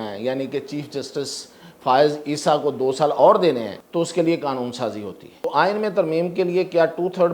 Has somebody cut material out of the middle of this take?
yes; 2 cuts; at 3.8 s, 5.5 s

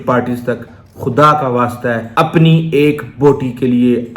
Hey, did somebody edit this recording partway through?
yes; 1 cut; at 2.1 s

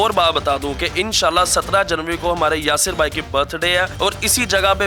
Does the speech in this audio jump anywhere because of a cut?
no; 0 cuts

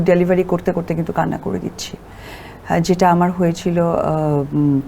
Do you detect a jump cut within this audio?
no; 0 cuts

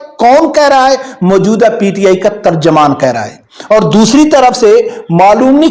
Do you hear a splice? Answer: no; 0 cuts

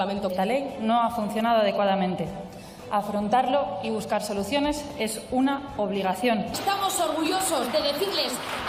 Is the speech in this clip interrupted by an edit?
no; 0 cuts

